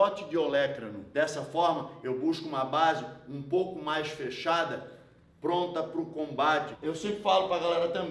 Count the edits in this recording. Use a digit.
2